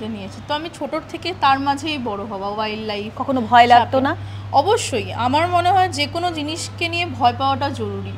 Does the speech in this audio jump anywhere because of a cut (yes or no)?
no